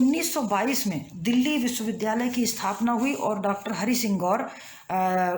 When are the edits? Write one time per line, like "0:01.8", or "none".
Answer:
none